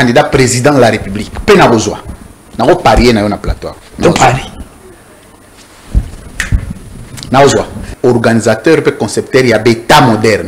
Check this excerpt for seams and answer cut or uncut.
cut